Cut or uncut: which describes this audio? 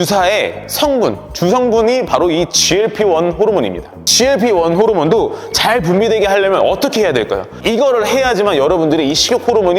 cut